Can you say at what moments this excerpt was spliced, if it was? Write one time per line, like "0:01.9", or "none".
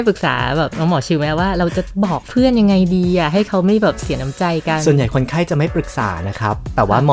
none

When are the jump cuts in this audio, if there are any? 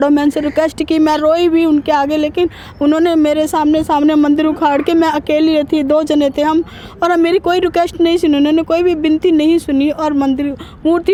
none

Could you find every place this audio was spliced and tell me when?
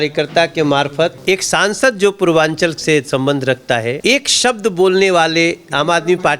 0:01.2
0:04.0

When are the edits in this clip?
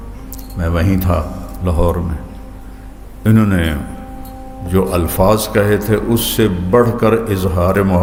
none

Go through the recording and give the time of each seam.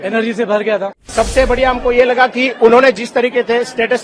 0:01.1

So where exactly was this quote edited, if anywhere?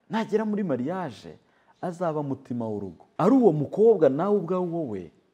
0:03.0

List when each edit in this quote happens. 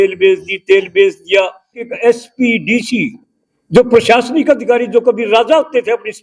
0:01.8

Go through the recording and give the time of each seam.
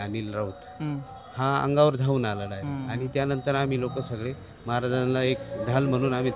none

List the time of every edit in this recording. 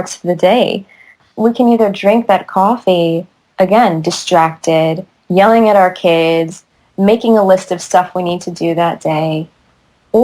0:01.2

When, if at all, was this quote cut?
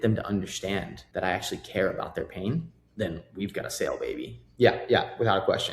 0:04.4

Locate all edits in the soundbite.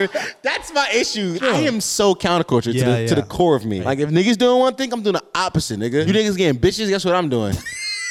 0:01.4
0:03.8
0:06.1

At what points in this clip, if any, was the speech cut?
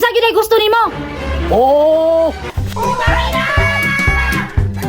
0:02.5

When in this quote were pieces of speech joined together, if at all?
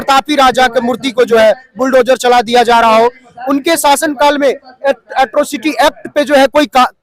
none

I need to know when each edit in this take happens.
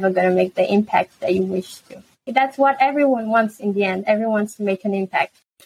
0:02.3

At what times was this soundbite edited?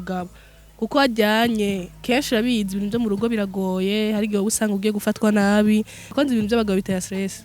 0:06.1

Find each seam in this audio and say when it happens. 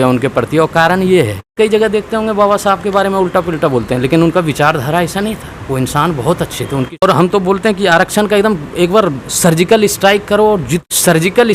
0:01.5
0:07.0
0:10.8

